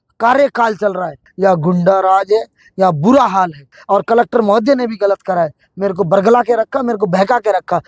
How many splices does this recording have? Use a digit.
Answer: 2